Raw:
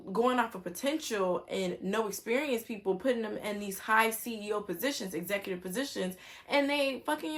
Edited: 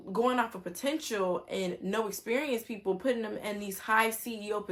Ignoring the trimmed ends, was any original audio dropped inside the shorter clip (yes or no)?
no